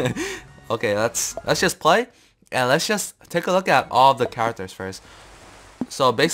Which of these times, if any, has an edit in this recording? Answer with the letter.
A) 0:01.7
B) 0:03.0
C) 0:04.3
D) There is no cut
C